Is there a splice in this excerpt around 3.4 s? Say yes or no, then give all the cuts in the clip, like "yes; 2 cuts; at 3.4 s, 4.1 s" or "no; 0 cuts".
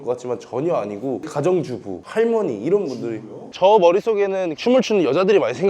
yes; 1 cut; at 3.4 s